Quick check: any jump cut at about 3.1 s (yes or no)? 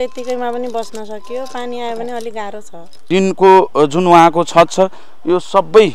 yes